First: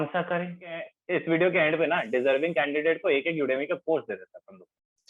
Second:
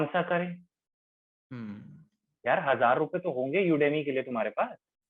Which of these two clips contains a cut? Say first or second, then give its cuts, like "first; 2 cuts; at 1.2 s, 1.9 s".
first; 1 cut; at 1.0 s